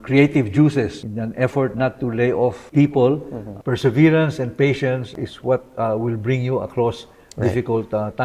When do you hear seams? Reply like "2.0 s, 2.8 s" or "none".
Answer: 1.0 s, 2.6 s, 3.5 s, 5.1 s